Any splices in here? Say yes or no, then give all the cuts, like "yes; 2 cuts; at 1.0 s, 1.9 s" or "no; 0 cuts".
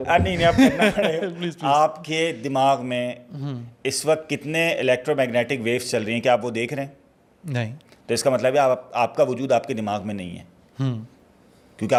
no; 0 cuts